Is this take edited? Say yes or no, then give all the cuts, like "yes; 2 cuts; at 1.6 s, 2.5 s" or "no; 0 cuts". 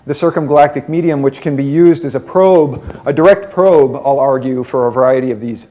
no; 0 cuts